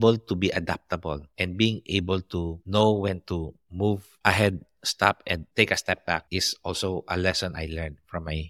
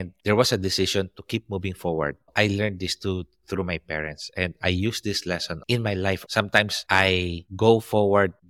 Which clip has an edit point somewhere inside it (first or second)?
second